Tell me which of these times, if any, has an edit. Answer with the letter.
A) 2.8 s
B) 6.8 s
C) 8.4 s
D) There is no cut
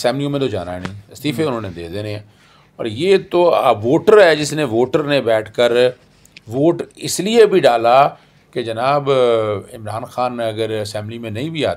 D